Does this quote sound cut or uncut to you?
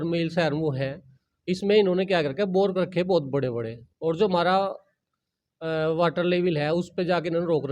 uncut